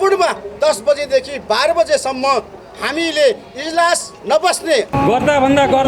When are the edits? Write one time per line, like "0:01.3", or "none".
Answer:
0:04.1
0:04.9